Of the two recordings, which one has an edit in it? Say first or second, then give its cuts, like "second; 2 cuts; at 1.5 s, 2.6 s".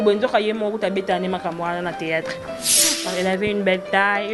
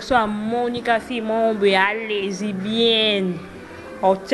first; 1 cut; at 2.9 s